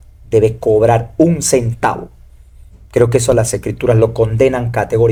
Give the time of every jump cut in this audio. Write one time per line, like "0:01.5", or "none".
none